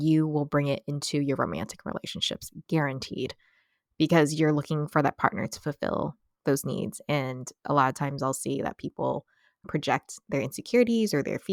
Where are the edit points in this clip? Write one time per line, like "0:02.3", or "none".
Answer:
none